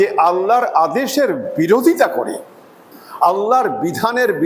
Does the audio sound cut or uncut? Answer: cut